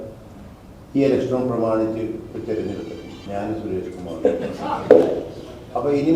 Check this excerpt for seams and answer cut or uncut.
cut